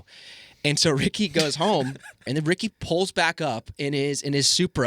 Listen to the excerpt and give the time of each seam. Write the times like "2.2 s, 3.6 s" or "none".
2.2 s